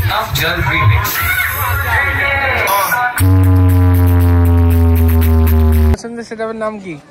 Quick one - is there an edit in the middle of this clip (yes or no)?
yes